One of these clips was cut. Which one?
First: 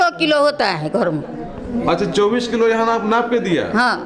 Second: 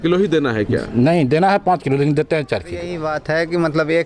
second; 1 cut; at 3.0 s

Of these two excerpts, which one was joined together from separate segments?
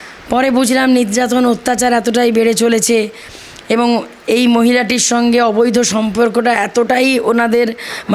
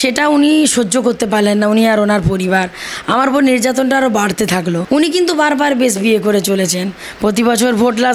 second; 1 cut; at 4.8 s

